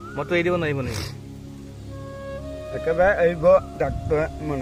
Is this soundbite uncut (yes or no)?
yes